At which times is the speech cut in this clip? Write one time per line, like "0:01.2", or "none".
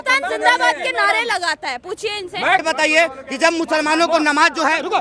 0:02.6